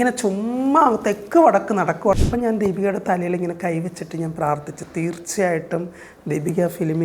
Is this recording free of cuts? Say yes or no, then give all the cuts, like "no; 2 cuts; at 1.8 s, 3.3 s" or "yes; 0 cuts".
no; 1 cut; at 2.2 s